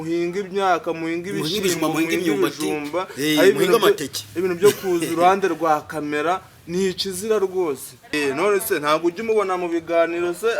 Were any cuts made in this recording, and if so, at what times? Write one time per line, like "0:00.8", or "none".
0:08.1